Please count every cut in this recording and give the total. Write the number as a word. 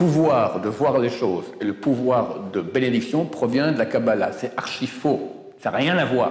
zero